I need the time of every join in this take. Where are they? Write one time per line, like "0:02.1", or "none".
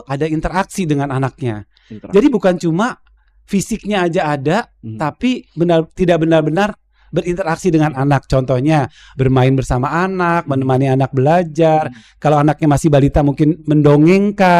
none